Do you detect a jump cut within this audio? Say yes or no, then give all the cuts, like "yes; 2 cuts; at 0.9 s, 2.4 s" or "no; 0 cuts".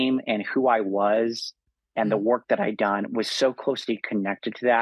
no; 0 cuts